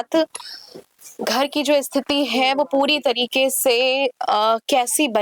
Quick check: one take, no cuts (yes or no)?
yes